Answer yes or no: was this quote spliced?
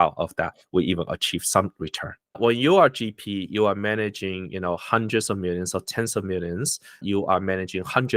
yes